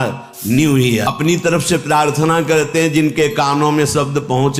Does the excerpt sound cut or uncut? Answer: cut